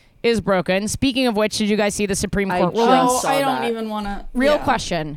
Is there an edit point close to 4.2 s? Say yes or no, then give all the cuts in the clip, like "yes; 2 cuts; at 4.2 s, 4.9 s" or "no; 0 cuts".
yes; 1 cut; at 4.2 s